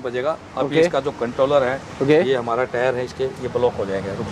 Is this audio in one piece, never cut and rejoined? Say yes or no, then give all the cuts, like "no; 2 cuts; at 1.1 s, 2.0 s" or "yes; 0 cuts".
yes; 0 cuts